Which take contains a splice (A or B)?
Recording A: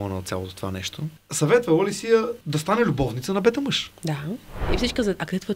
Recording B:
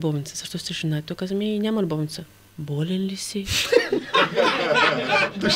A